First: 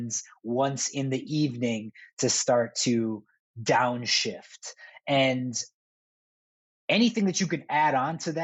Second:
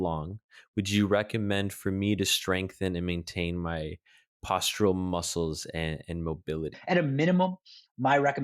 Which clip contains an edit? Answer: second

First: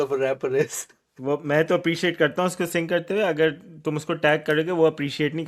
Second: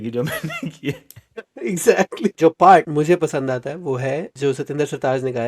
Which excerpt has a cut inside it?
second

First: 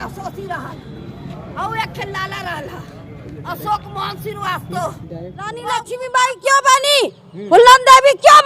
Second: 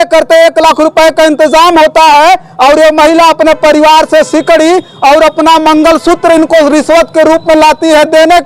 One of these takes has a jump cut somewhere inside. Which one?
first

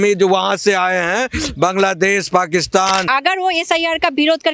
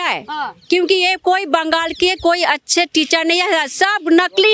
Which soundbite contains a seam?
first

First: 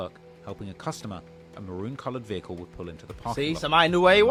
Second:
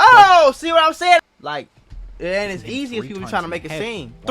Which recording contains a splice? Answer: second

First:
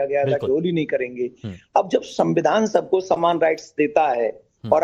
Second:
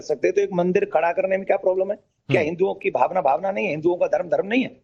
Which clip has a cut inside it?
second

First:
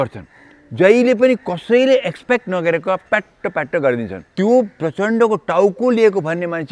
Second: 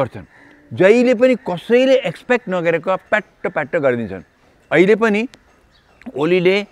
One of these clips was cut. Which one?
first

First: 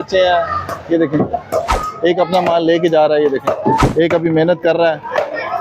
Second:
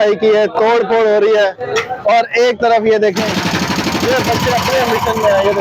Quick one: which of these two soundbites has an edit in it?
first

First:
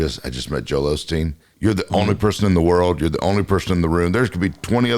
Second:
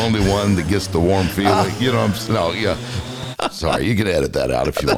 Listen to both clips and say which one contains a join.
first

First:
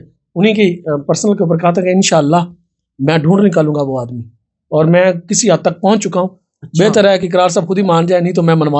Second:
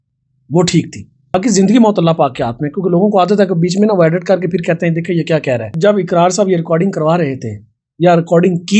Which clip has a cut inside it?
second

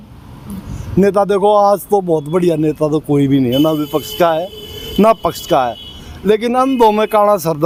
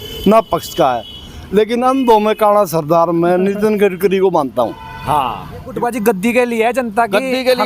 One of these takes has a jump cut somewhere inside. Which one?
second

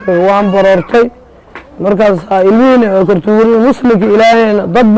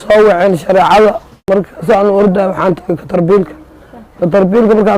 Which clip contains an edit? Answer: second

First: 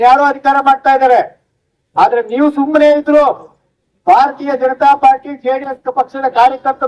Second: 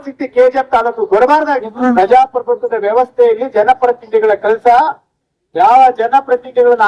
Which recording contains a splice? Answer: second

